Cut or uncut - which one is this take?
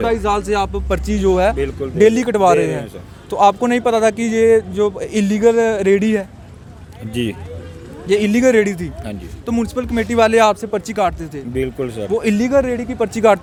uncut